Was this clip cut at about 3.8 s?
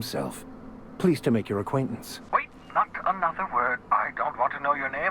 no; 1 cut; at 2.1 s

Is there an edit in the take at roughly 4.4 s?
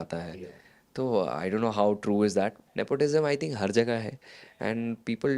no; 1 cut; at 2.6 s

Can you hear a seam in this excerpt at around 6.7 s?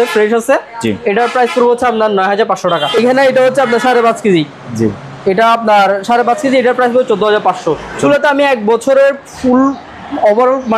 no; 2 cuts; at 2.9 s, 8.0 s

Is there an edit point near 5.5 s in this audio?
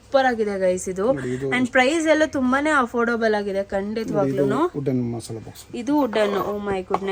no; 0 cuts

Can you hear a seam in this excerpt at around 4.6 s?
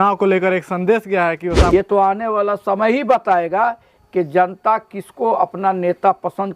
no; 1 cut; at 1.7 s

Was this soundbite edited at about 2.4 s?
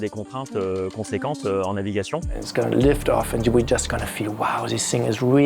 yes; 1 cut; at 2.4 s

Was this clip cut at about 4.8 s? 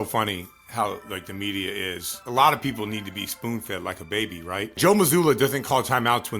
yes; 2 cuts; at 2.2 s, 4.8 s

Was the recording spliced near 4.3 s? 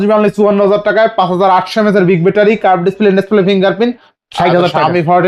yes; 1 cut; at 4.3 s

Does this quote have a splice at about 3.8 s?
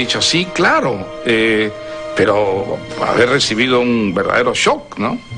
no; 0 cuts

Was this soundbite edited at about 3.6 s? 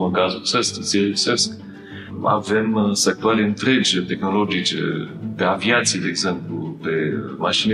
no; 0 cuts

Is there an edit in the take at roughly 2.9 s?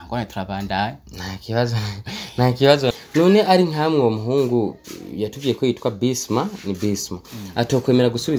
yes; 1 cut; at 2.9 s

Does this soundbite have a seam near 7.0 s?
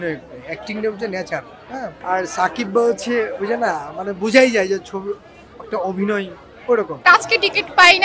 yes; 2 cuts; at 2.0 s, 7.0 s

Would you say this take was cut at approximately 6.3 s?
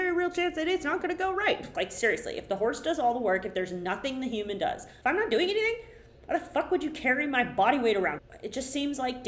no; 3 cuts; at 1.7 s, 4.9 s, 8.2 s

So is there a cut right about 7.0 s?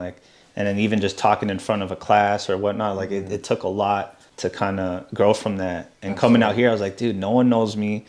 no; 0 cuts

